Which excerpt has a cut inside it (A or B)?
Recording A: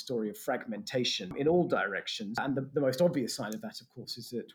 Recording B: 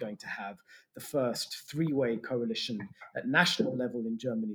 A